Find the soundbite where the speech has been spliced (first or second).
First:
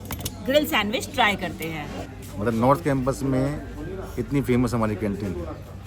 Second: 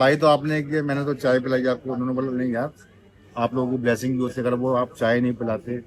first